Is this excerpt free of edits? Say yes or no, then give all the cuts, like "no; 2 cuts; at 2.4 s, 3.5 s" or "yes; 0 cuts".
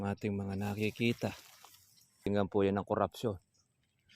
no; 1 cut; at 2.3 s